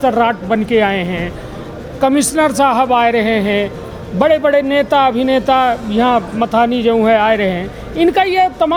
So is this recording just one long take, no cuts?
yes; 0 cuts

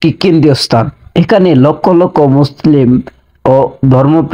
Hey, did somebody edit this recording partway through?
no; 0 cuts

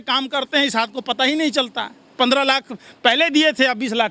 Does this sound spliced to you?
no; 0 cuts

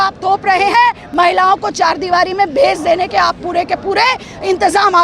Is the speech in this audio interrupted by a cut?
no; 0 cuts

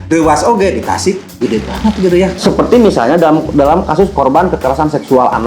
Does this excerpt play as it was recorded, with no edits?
no; 1 cut; at 2.4 s

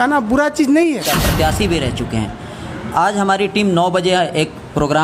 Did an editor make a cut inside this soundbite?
yes; 1 cut; at 1.2 s

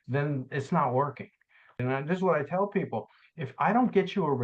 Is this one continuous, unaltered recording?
no; 1 cut; at 1.8 s

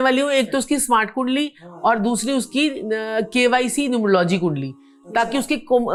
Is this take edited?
no; 0 cuts

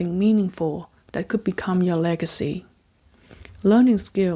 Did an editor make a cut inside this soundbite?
no; 0 cuts

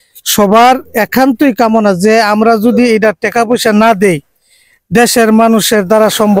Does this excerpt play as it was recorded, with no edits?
yes; 0 cuts

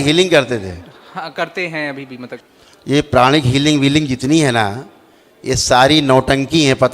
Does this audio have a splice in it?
yes; 1 cut; at 2.5 s

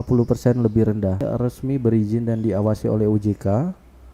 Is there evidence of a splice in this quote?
yes; 1 cut; at 1.2 s

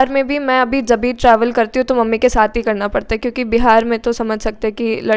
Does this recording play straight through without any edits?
yes; 0 cuts

